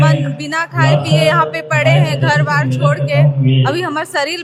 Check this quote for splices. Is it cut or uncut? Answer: uncut